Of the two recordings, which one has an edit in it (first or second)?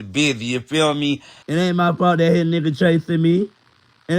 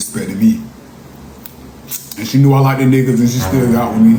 first